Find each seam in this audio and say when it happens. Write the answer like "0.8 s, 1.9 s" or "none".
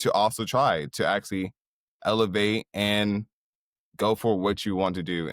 none